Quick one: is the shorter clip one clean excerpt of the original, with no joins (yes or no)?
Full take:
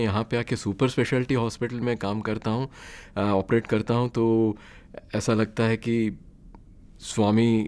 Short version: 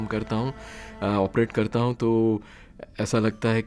yes